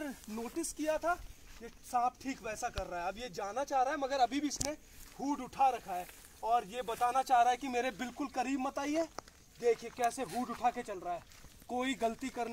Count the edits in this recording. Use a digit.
0